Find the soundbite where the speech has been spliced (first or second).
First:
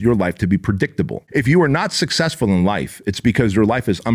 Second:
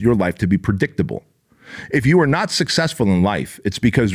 first